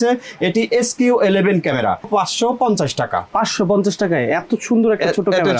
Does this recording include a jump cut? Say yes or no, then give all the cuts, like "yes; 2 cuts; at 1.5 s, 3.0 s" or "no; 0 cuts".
yes; 1 cut; at 2.1 s